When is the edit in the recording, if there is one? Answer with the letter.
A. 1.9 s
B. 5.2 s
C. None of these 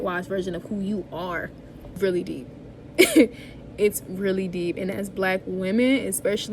A